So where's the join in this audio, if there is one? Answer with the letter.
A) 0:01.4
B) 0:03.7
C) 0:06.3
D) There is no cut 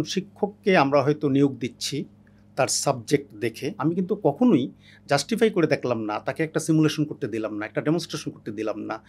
B